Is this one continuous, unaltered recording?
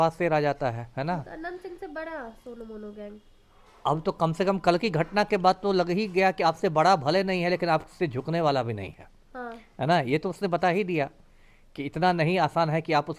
yes; 0 cuts

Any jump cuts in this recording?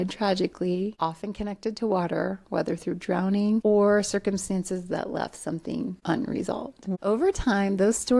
yes; 4 cuts; at 0.9 s, 3.6 s, 6.0 s, 7.0 s

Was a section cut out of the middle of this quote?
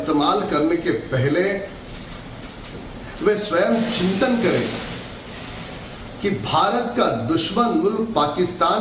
yes; 1 cut; at 4.5 s

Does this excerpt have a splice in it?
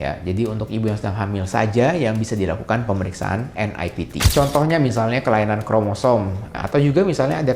yes; 2 cuts; at 4.3 s, 6.6 s

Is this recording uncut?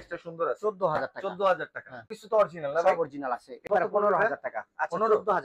no; 2 cuts; at 2.1 s, 3.6 s

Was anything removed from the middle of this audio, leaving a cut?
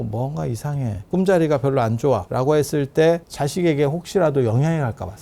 yes; 3 cuts; at 1.0 s, 2.3 s, 3.3 s

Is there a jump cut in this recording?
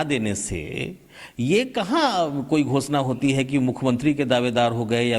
no; 0 cuts

